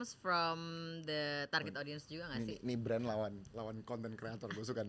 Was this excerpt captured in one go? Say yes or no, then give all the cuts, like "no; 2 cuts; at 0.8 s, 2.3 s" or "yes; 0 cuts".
yes; 0 cuts